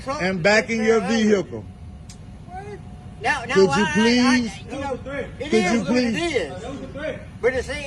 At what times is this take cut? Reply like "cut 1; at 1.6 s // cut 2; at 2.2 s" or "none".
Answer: cut 1; at 1.3 s